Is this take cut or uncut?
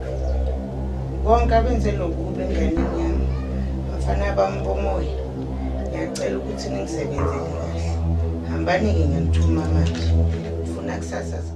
uncut